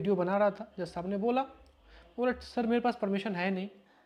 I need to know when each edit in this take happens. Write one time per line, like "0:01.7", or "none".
none